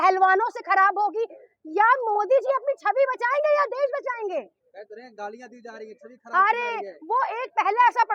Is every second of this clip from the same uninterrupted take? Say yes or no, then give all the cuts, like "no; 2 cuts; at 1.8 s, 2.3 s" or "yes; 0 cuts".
yes; 0 cuts